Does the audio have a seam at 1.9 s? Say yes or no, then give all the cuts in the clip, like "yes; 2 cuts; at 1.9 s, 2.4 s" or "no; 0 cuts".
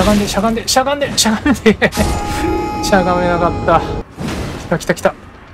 no; 1 cut; at 4.0 s